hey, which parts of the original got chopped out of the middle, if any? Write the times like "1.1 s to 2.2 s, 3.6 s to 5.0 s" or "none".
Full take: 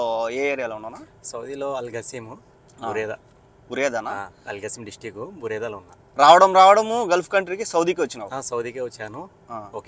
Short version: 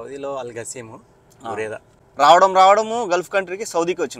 3.3 s to 6.0 s